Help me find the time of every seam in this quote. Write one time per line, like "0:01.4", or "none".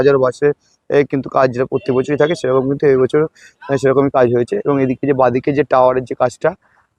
none